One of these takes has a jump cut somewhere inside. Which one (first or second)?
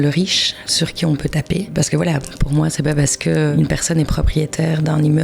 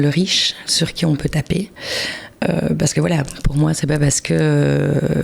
first